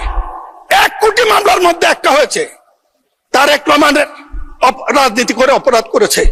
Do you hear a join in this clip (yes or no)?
no